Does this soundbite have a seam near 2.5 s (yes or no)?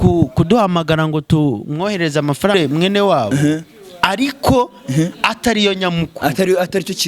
yes